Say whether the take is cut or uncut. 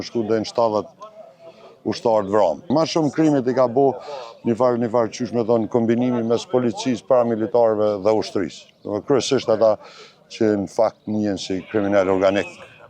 cut